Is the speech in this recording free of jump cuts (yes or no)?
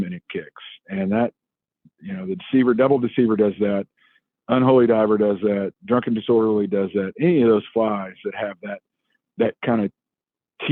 yes